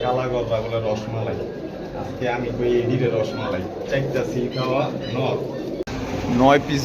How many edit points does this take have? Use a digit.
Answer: 1